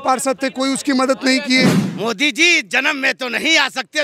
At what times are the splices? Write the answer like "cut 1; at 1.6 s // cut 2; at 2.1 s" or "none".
cut 1; at 1.8 s